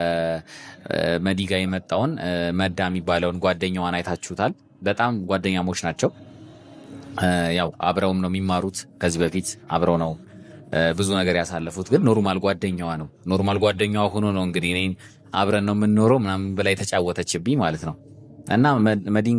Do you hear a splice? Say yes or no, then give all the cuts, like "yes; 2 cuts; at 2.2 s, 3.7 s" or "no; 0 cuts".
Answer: no; 0 cuts